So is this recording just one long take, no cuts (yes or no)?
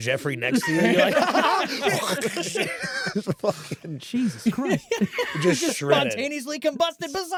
yes